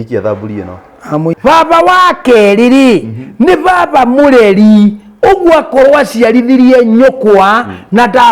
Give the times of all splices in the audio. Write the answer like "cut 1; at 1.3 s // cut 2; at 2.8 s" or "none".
cut 1; at 1.4 s